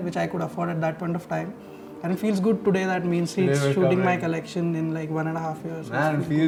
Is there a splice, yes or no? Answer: no